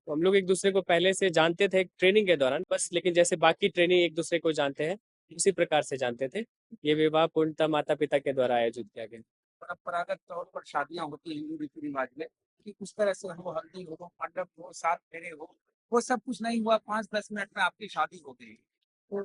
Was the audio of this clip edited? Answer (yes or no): no